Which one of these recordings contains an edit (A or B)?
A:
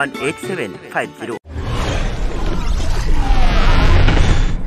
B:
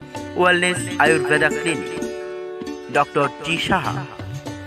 A